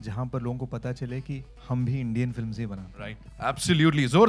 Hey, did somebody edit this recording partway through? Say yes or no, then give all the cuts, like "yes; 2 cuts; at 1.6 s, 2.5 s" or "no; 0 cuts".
no; 0 cuts